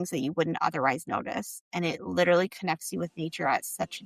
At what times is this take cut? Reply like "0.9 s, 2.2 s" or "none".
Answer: none